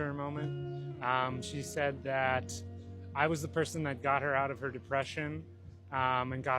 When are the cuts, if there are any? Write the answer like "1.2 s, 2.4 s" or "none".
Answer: 1.3 s